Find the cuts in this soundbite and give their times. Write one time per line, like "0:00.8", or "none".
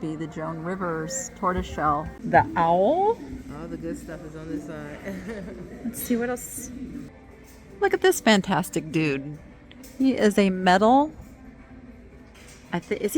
0:02.1
0:07.1